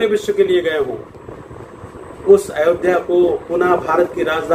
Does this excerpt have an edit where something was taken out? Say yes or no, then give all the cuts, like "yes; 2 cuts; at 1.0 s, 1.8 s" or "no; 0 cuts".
no; 0 cuts